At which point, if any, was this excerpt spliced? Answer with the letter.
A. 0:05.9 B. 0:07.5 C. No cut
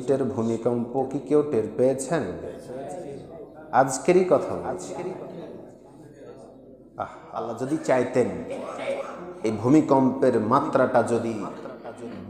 B